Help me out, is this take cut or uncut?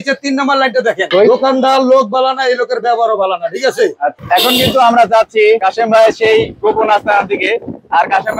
cut